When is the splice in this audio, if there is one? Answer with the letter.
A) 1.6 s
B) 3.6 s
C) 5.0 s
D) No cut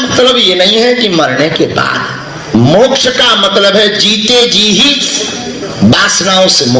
D